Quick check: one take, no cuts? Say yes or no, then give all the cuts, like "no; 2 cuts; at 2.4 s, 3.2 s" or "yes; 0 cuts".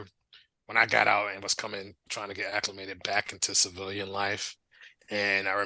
yes; 0 cuts